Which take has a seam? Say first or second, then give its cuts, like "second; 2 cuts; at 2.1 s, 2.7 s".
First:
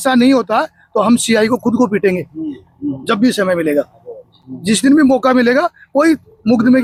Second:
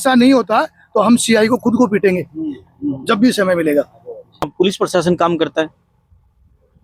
second; 1 cut; at 4.5 s